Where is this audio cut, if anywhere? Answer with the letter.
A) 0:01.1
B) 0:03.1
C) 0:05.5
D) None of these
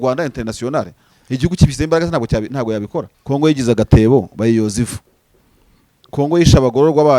B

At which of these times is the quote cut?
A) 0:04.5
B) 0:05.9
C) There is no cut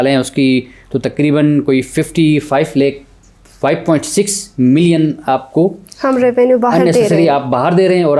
C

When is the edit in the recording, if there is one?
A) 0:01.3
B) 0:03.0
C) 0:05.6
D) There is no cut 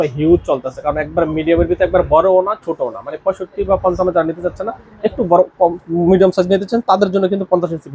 D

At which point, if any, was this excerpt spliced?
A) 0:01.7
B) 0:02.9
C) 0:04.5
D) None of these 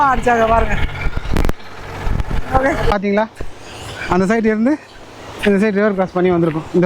B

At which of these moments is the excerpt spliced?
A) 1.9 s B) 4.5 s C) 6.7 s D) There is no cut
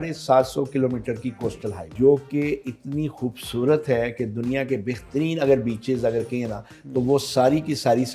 A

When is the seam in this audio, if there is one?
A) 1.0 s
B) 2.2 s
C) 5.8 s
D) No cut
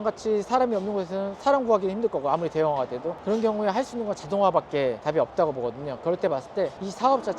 D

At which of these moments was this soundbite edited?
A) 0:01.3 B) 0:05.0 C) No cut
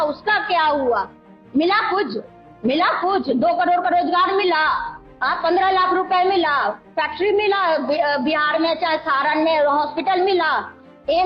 A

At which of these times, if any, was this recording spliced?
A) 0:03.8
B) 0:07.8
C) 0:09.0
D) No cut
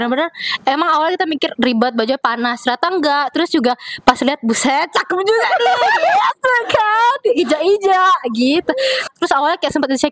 C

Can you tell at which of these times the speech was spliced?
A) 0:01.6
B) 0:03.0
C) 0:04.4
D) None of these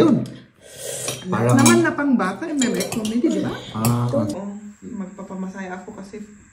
C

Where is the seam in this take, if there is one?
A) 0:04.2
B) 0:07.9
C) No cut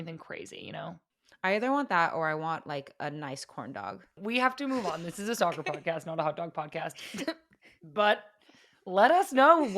A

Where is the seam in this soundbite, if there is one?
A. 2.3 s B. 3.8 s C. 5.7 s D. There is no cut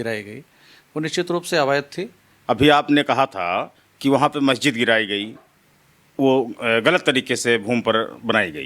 A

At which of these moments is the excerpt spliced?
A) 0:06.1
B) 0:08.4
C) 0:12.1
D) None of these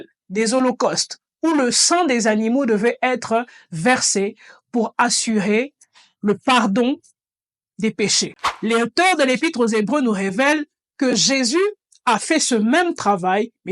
B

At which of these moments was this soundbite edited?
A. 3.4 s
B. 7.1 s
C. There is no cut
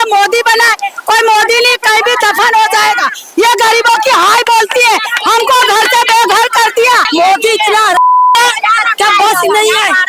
B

